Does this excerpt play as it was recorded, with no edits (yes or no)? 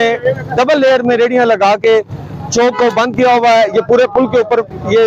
yes